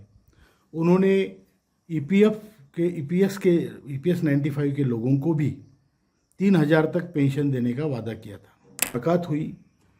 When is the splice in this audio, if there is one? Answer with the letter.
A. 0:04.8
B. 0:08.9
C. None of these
B